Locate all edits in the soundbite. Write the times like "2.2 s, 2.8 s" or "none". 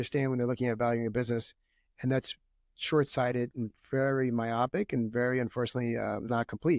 none